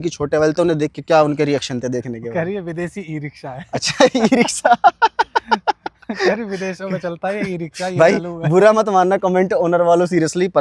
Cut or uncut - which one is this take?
uncut